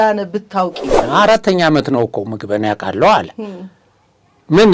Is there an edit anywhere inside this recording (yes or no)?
yes